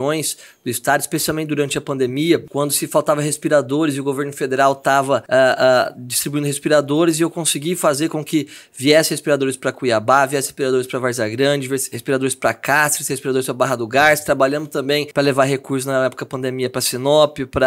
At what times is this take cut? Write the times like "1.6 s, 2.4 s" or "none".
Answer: 2.5 s, 5.2 s, 15.1 s

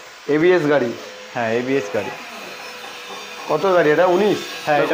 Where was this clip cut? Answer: none

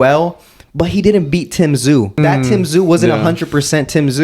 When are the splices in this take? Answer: 2.2 s

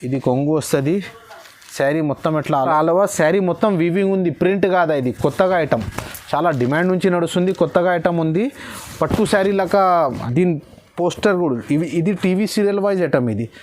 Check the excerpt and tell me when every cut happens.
2.7 s, 10.2 s

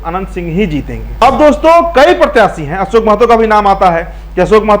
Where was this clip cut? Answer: 1.2 s

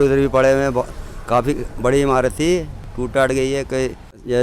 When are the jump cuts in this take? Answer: none

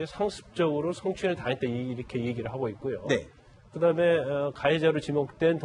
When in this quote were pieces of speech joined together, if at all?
1.1 s

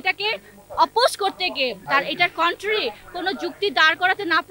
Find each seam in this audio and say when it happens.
1.9 s

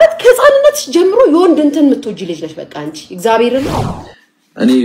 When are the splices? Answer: 3.9 s

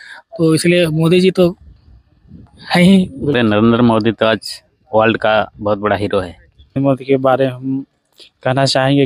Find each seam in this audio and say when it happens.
3.3 s, 6.8 s

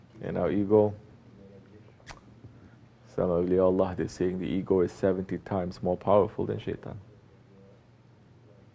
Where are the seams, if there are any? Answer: 5.1 s

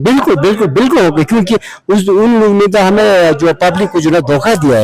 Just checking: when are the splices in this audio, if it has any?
none

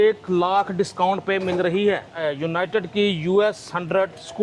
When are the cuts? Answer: 2.1 s

